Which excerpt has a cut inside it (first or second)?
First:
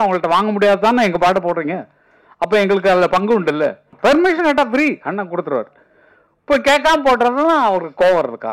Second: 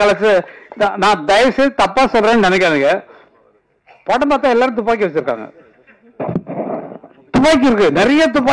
first